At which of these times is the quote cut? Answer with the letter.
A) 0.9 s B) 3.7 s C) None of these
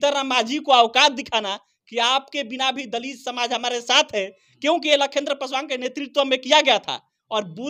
C